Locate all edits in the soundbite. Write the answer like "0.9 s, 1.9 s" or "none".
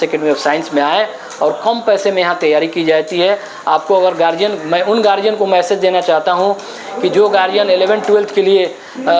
none